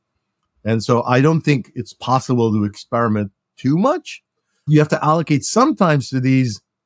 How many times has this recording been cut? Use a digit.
1